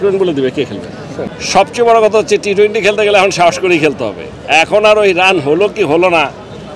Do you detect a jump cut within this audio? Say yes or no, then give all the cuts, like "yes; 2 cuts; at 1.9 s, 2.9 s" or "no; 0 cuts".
yes; 1 cut; at 1.2 s